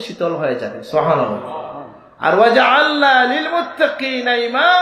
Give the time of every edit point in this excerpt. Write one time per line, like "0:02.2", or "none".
none